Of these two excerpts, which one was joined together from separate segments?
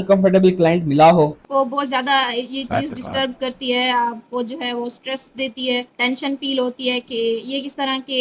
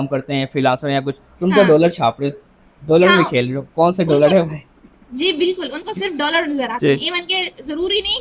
first; 2 cuts; at 1.4 s, 5.9 s

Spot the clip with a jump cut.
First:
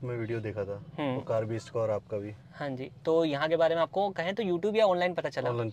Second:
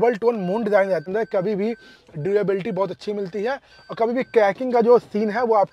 second; 1 cut; at 1.0 s

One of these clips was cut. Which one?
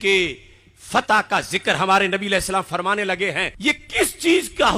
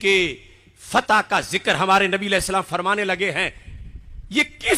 first; 1 cut; at 3.5 s

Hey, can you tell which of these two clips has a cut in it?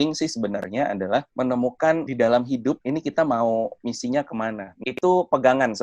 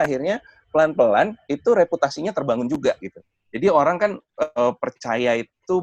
first; 2 cuts; at 1.3 s, 4.8 s

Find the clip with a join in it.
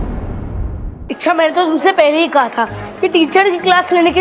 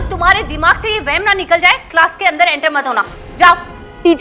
first; 1 cut; at 0.9 s

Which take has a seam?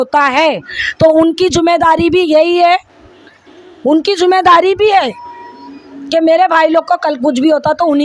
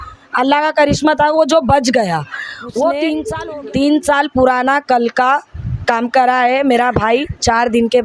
second; 1 cut; at 3.3 s

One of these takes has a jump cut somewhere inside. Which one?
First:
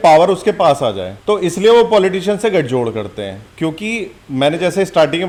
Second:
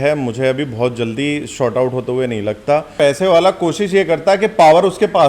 second; 1 cut; at 2.9 s

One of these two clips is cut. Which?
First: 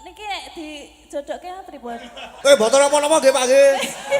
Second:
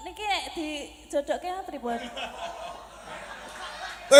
first; 1 cut; at 2.3 s

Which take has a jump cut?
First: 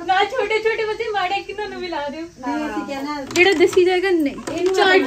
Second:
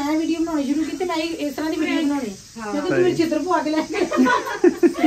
first; 1 cut; at 3.2 s

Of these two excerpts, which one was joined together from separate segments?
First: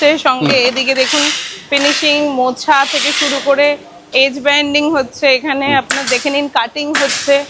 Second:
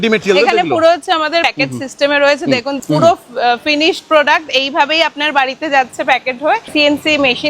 second; 3 cuts; at 1.5 s, 2.8 s, 6.7 s

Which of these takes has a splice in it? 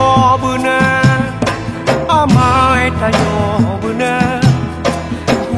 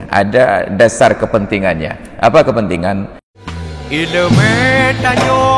second; 1 cut; at 3.4 s

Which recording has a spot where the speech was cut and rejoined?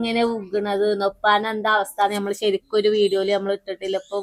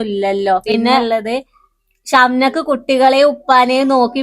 second; 1 cut; at 1.0 s

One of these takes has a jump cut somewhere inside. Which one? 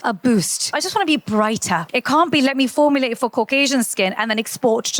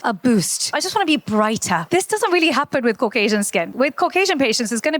first; 1 cut; at 1.8 s

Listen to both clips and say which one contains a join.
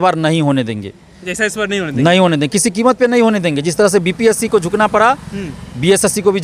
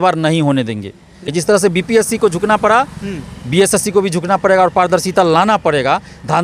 second; 1 cut; at 1.3 s

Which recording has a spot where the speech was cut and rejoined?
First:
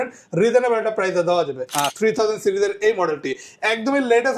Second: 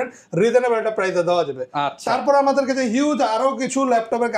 first; 1 cut; at 1.8 s

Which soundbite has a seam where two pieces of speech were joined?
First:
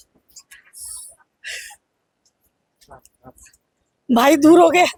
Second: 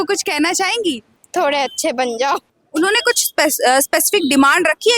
second; 2 cuts; at 1.1 s, 2.6 s

